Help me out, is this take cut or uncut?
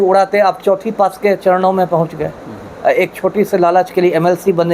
uncut